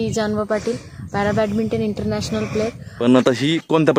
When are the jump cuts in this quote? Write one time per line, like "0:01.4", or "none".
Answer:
0:02.8